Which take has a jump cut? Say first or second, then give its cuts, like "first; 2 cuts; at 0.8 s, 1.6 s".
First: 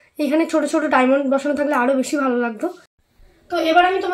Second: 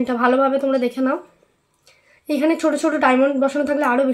first; 1 cut; at 3.1 s